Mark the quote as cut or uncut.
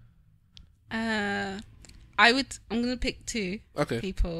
uncut